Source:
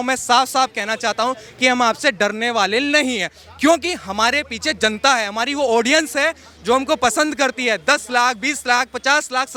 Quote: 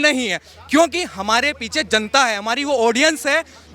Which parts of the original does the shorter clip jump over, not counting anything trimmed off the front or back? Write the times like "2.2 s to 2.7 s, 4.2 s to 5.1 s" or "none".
none